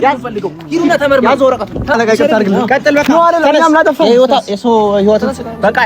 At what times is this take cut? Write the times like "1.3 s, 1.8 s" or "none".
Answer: 2.0 s